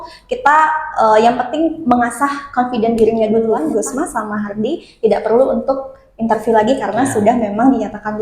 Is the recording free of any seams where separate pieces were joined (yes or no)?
no